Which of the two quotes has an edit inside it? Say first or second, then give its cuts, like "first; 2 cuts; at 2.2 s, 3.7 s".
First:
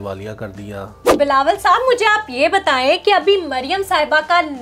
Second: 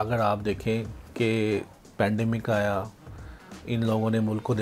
first; 1 cut; at 1.1 s